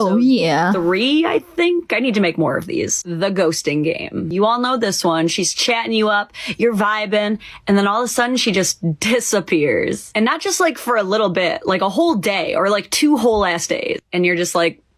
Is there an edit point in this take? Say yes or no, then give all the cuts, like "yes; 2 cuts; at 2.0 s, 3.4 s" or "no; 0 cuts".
no; 0 cuts